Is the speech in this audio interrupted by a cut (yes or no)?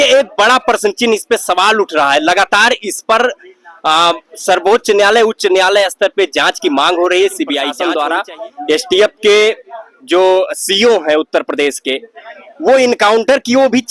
yes